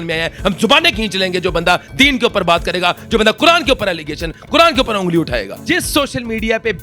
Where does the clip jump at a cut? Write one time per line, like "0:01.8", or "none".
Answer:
0:05.6